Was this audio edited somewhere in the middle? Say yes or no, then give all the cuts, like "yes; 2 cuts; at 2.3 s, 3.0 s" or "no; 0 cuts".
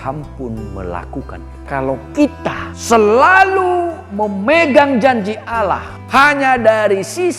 yes; 3 cuts; at 1.6 s, 2.7 s, 5.9 s